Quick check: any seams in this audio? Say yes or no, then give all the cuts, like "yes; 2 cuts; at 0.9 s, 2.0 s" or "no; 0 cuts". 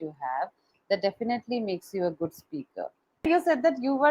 yes; 1 cut; at 3.2 s